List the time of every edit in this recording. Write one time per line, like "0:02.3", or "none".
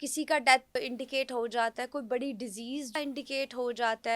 0:00.8
0:03.0

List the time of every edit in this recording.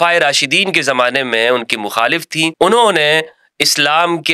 0:02.5

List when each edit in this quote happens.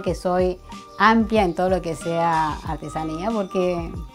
none

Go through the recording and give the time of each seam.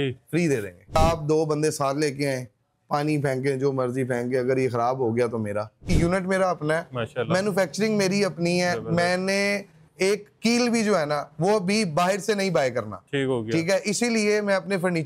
0:00.9
0:05.8

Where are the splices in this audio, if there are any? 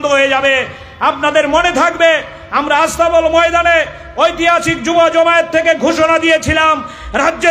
none

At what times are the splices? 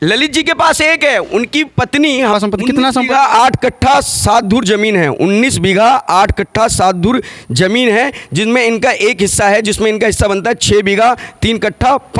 0:02.3

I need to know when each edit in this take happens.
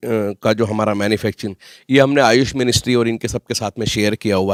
none

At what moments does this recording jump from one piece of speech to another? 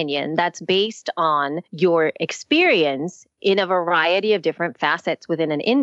0:01.6

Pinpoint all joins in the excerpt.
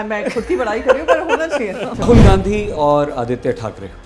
0:02.0

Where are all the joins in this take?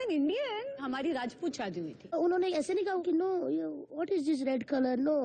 0:00.8
0:02.1
0:03.0

